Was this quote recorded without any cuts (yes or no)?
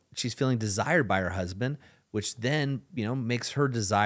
yes